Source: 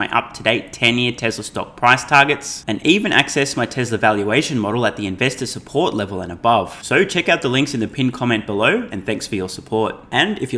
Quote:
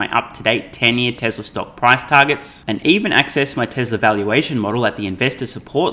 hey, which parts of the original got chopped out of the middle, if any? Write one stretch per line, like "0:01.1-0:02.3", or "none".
none